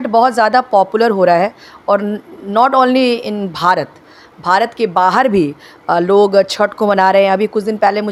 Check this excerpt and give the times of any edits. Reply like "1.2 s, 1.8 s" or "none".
none